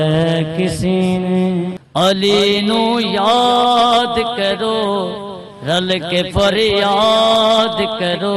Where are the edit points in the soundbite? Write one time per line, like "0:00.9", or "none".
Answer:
0:01.8

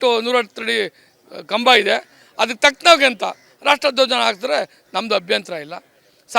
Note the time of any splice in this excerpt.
0:03.9

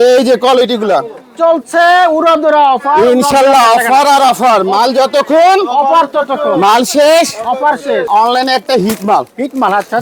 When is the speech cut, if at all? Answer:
0:08.1

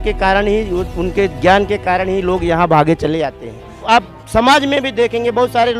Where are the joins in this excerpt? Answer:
0:03.8

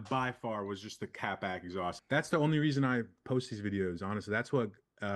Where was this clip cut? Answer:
0:02.0

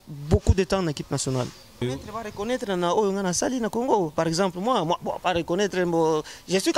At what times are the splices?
0:01.8

